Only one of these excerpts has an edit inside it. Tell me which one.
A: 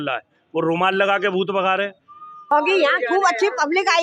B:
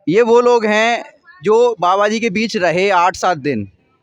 A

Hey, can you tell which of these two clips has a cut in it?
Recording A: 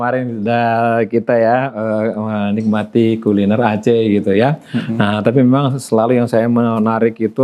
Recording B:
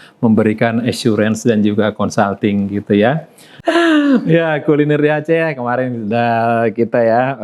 B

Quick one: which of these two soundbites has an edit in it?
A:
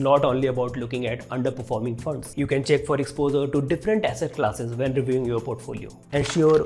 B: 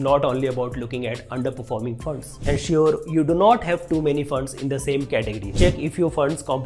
B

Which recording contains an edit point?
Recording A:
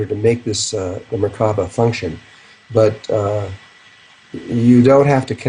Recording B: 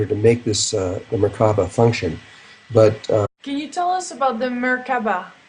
A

